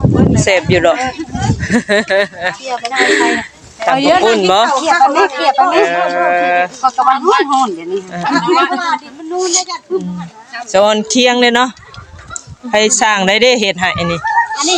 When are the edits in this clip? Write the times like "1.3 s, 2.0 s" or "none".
none